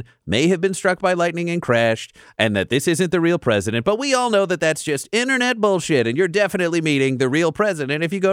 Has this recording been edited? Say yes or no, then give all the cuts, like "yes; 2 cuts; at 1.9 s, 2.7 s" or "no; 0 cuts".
no; 0 cuts